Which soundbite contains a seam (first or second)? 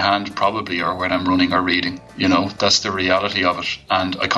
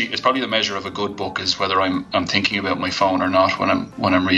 first